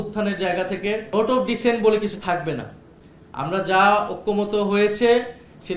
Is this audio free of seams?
no; 1 cut; at 1.0 s

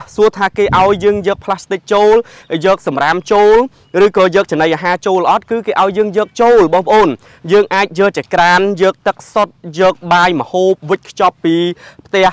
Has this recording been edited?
no; 0 cuts

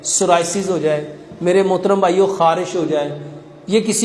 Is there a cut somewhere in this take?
no; 0 cuts

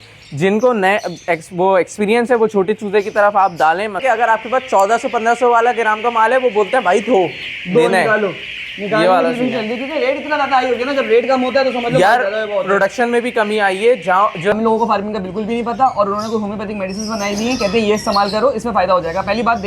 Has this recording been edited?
yes; 2 cuts; at 4.0 s, 14.5 s

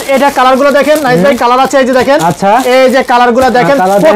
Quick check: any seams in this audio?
no; 0 cuts

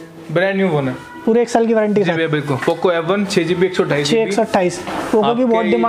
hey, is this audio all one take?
yes; 0 cuts

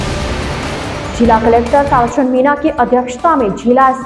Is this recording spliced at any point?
yes; 1 cut; at 1.1 s

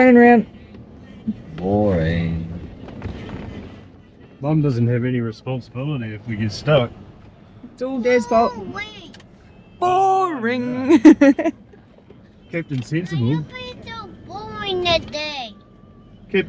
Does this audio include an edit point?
no; 0 cuts

